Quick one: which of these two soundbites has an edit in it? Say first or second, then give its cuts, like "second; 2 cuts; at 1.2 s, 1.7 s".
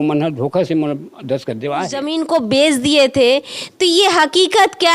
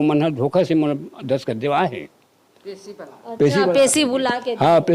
first; 1 cut; at 2.1 s